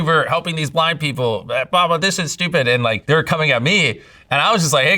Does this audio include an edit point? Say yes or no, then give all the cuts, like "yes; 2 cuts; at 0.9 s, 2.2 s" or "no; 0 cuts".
no; 0 cuts